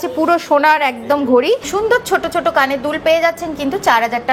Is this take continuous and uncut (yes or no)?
no